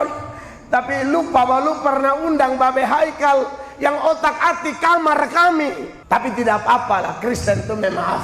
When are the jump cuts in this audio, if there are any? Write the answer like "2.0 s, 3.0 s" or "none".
5.9 s